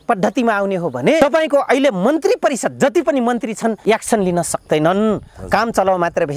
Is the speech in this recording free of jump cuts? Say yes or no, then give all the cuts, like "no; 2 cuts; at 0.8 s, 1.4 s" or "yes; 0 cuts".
no; 2 cuts; at 1.2 s, 3.8 s